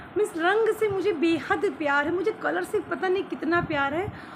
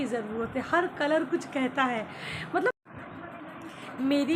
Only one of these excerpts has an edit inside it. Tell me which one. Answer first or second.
second